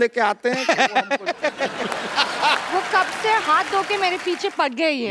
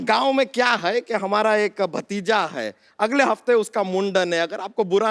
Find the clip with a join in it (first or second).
first